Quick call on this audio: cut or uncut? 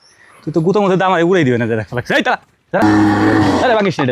cut